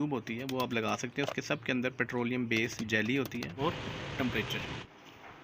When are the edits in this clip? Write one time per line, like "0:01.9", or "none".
0:03.6